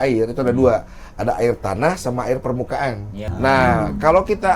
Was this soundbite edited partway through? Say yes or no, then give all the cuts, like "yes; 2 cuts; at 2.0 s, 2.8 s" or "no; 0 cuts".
yes; 1 cut; at 3.2 s